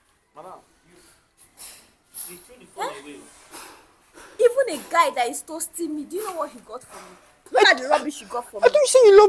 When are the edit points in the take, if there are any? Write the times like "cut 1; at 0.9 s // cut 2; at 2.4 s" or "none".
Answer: cut 1; at 7.5 s